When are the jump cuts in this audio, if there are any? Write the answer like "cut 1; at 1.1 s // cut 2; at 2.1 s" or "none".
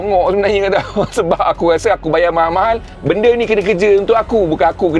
none